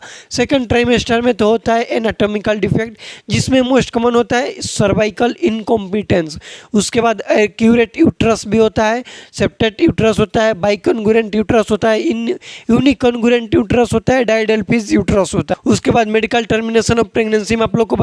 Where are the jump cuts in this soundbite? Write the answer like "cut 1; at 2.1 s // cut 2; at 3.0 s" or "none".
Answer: cut 1; at 15.5 s